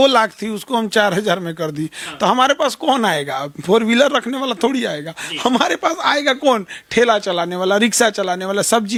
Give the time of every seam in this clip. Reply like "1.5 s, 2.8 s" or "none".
none

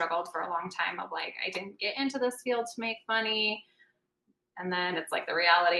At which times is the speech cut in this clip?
none

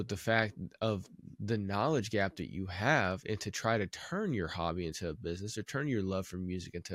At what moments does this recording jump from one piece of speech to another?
none

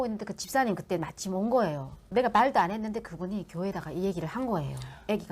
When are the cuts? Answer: none

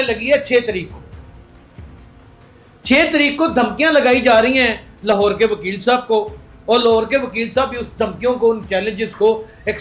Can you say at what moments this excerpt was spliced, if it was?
none

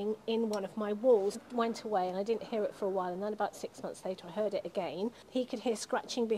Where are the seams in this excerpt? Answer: 1.4 s, 5.2 s

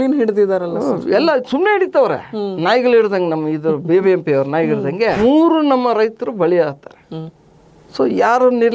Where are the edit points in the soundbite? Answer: 5.2 s

